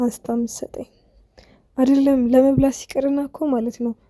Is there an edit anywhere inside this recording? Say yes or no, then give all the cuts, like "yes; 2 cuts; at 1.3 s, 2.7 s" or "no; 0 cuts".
no; 0 cuts